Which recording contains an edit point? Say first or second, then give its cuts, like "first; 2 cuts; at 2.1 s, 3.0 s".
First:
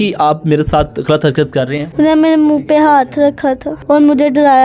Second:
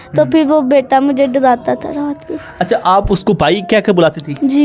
first; 2 cuts; at 1.8 s, 3.7 s